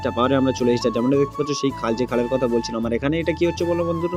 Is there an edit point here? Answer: no; 0 cuts

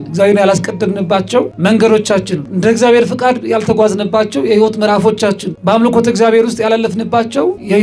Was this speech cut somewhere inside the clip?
no; 0 cuts

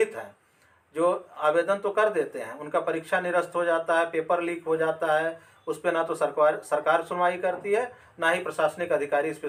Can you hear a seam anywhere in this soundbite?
no; 0 cuts

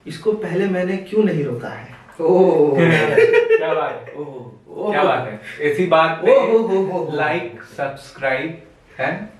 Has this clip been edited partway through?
no; 0 cuts

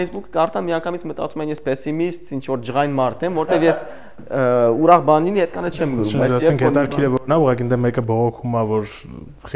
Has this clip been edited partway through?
no; 0 cuts

